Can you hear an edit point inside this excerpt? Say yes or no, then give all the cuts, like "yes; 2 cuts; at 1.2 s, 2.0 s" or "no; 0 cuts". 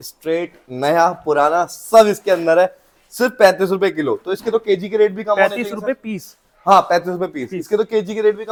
no; 0 cuts